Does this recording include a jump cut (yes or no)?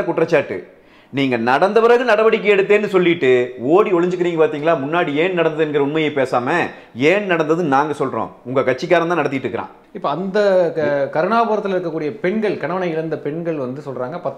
yes